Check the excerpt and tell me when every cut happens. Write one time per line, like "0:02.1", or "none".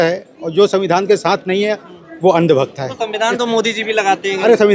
none